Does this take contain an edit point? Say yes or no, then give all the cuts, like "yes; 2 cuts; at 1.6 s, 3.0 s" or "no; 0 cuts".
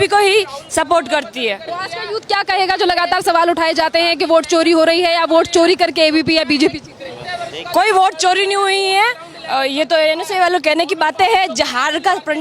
no; 0 cuts